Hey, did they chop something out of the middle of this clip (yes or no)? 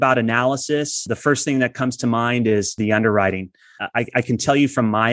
yes